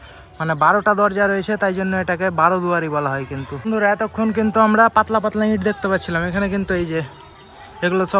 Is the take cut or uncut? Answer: uncut